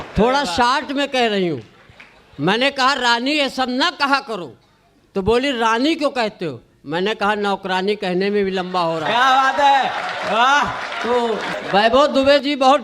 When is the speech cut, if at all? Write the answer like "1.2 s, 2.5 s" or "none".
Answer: 11.5 s